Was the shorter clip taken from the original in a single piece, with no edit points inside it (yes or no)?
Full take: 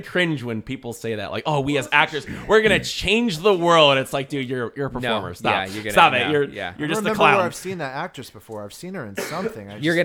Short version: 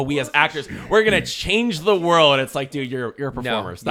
yes